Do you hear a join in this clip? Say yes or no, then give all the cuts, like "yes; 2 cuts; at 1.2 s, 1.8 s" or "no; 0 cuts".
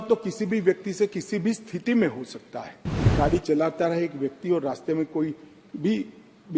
yes; 1 cut; at 3.1 s